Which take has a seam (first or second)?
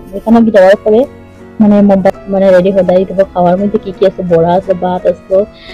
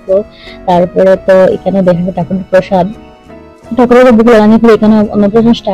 first